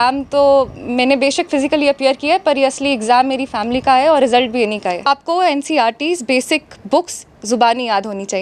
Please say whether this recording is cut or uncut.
cut